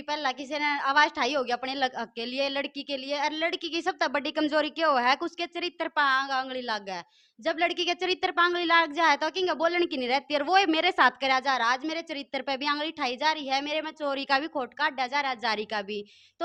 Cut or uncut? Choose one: uncut